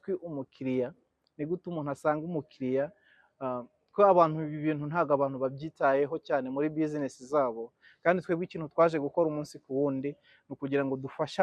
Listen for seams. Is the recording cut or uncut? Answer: uncut